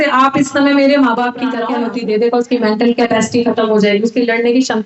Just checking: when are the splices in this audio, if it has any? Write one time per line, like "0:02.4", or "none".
0:01.7